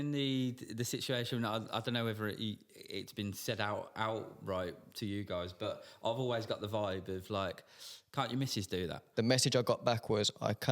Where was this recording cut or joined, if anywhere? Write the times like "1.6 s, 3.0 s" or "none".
9.0 s